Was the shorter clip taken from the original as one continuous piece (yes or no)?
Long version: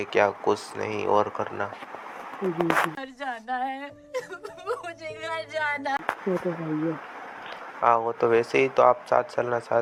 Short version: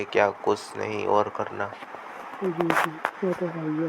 no